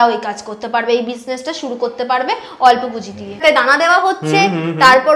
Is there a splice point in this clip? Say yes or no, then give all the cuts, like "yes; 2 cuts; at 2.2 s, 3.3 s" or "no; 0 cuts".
yes; 1 cut; at 3.4 s